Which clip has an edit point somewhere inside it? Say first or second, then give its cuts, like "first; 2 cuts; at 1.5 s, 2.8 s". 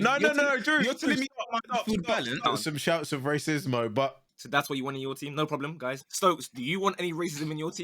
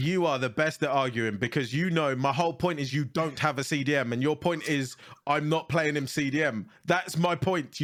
first; 3 cuts; at 2.4 s, 4.3 s, 6.1 s